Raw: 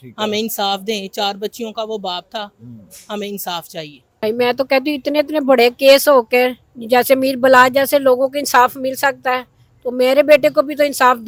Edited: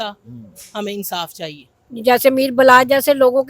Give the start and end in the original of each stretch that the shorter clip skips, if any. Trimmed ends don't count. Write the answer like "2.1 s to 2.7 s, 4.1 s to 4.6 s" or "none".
4.1 s to 6.6 s